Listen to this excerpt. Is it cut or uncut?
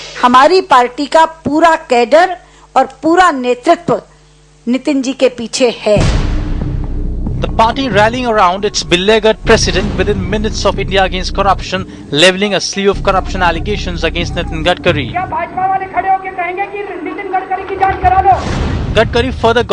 uncut